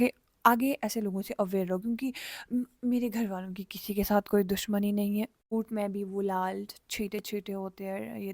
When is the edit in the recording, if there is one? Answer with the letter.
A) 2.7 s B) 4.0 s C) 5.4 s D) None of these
C